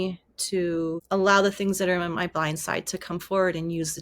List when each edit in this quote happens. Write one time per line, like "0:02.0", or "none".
0:01.0